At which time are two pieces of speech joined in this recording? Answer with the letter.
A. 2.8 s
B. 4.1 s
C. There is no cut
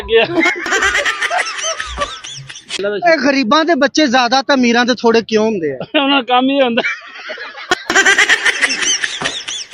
A